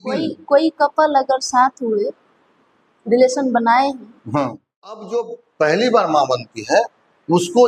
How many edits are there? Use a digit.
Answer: 1